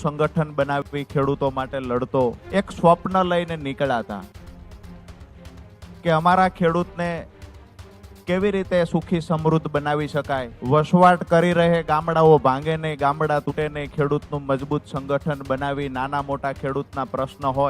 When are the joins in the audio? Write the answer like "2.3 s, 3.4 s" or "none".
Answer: 2.4 s, 10.5 s